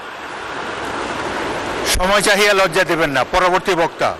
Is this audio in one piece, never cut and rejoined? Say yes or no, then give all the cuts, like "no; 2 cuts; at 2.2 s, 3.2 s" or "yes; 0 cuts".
yes; 0 cuts